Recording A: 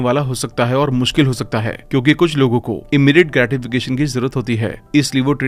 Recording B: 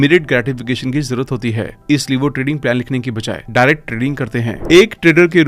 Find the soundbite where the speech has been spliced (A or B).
B